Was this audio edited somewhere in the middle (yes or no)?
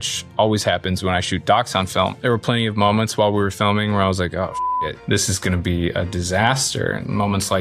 yes